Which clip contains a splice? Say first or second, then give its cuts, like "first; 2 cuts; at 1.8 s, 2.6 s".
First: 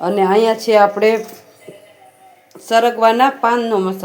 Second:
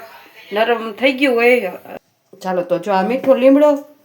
second; 1 cut; at 1.9 s